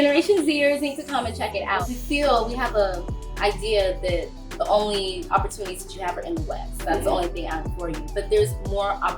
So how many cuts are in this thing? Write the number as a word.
one